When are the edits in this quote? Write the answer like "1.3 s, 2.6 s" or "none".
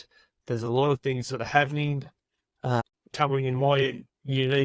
2.8 s